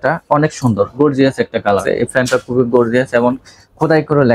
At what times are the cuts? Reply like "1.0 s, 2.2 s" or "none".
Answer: 2.0 s